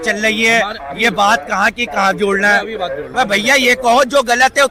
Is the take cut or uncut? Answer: uncut